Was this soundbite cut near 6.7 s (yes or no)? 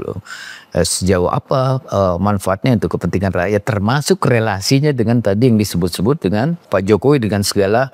yes